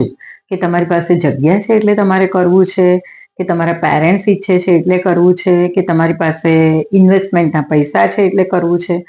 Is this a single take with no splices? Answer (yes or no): yes